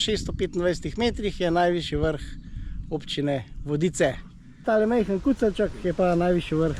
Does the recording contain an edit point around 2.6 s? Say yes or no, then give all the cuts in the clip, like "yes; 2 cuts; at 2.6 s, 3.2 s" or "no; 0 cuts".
no; 1 cut; at 4.6 s